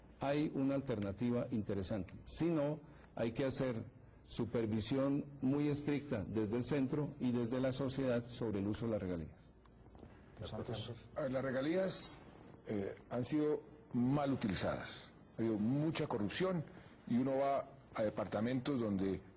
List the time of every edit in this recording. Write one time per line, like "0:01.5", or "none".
none